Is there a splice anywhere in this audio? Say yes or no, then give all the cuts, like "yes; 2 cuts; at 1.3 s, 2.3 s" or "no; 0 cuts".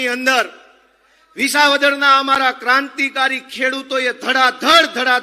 no; 0 cuts